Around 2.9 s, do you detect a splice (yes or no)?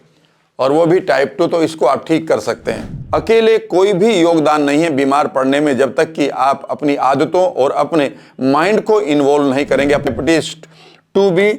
yes